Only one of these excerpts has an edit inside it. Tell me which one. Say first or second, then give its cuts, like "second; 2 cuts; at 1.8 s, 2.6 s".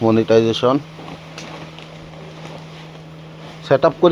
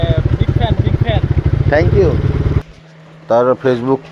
second; 1 cut; at 2.6 s